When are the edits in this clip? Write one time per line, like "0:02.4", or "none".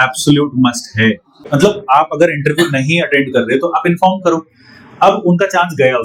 0:01.4